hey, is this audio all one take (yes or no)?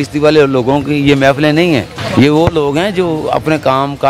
no